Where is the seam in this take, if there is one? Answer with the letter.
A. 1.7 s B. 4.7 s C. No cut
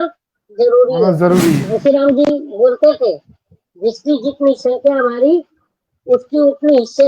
A